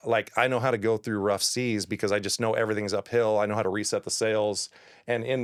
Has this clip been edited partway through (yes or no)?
no